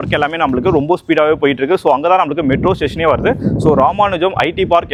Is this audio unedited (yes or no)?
yes